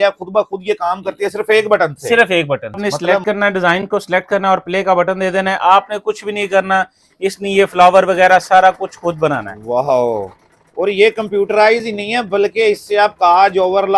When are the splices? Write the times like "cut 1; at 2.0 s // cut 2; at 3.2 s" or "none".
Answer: cut 1; at 2.8 s